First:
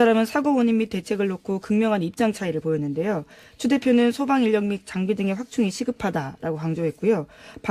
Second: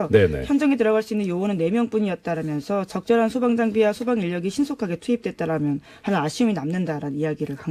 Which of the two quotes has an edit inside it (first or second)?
first